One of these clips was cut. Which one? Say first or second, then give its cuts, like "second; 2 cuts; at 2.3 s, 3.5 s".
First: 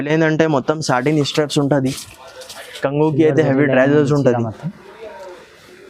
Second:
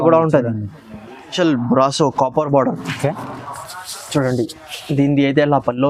second; 1 cut; at 1.2 s